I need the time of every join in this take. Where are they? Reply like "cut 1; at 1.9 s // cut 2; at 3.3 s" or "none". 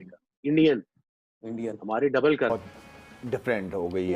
cut 1; at 2.5 s